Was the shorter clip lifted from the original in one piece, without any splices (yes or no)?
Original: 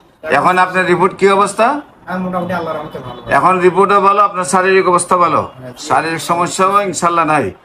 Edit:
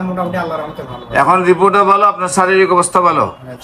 yes